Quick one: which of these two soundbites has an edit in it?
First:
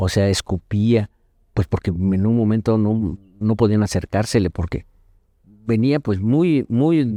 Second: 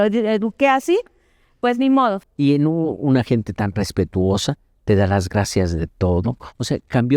second; 1 cut; at 2.3 s

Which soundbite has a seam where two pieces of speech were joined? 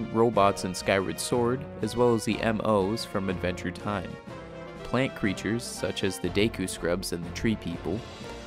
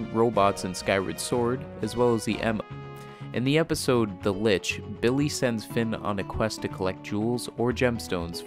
first; 1 cut; at 2.6 s

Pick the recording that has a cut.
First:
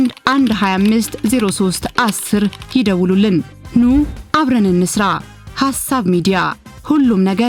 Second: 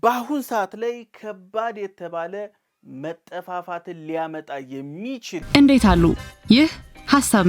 second; 1 cut; at 5.4 s

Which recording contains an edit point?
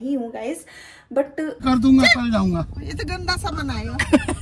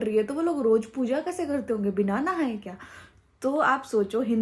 first; 1 cut; at 1.6 s

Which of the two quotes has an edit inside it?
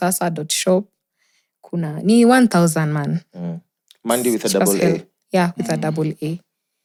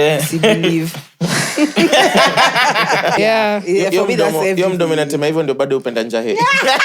second; 1 cut; at 3.2 s

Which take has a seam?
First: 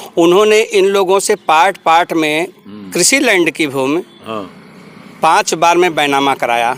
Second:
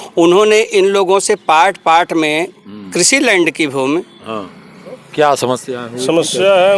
second; 1 cut; at 5.0 s

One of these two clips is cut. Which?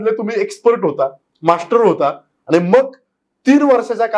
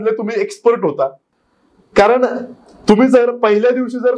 second; 1 cut; at 1.3 s

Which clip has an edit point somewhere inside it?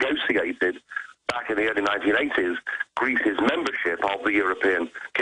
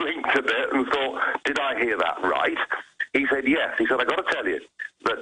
first; 1 cut; at 2.6 s

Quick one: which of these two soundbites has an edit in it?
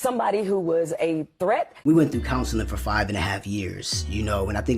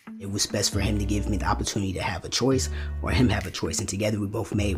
first; 1 cut; at 1.7 s

